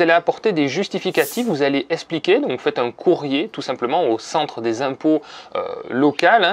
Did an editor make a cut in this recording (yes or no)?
no